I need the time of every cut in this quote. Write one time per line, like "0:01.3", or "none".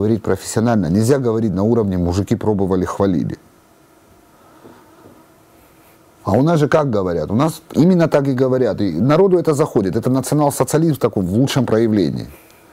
none